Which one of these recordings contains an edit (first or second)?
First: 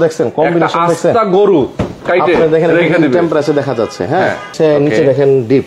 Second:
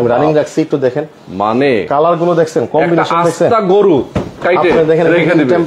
first